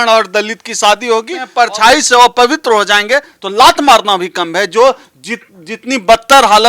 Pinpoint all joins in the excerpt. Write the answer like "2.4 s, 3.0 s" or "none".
1.4 s